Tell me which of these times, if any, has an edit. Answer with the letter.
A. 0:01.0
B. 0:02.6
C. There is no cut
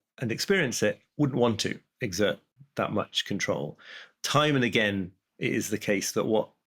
B